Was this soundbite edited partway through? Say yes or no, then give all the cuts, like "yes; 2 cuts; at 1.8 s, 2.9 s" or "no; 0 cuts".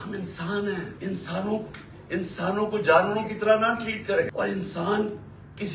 yes; 2 cuts; at 0.9 s, 4.3 s